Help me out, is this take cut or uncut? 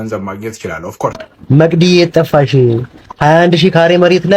cut